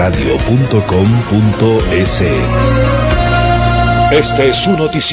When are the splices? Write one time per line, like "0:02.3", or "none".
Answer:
0:04.1